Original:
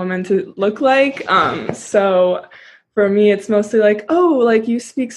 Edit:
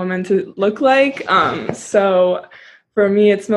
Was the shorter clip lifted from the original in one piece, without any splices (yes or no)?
yes